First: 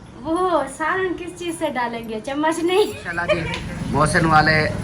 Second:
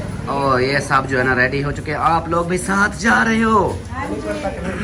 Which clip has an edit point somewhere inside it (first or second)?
first